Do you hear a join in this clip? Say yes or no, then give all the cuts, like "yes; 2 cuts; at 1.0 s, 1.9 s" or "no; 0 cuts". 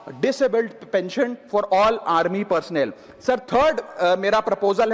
no; 0 cuts